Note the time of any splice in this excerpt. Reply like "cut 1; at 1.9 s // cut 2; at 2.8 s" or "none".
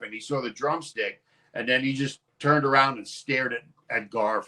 cut 1; at 2.2 s